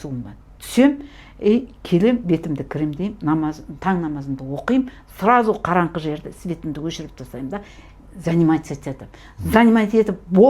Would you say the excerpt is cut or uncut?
uncut